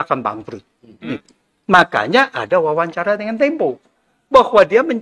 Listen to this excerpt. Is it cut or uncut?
cut